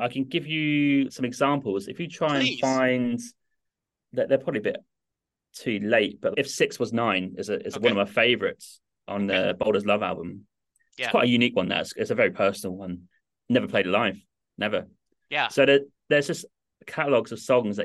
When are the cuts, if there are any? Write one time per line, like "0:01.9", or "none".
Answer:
none